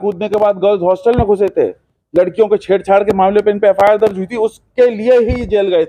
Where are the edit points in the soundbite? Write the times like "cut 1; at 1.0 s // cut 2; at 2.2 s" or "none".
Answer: none